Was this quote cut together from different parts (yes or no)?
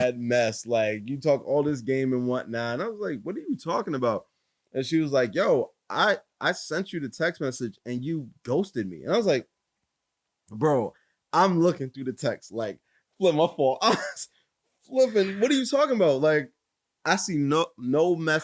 no